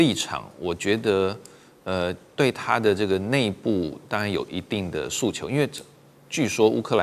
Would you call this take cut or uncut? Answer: uncut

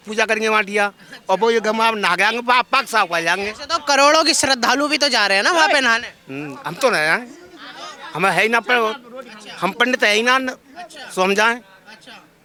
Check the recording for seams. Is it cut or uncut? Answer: uncut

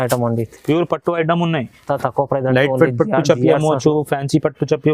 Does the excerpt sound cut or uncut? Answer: uncut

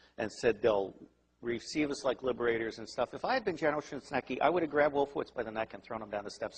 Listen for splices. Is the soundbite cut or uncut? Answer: uncut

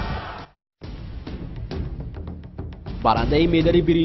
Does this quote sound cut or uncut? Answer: cut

